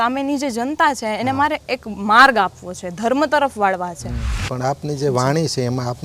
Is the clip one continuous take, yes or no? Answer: no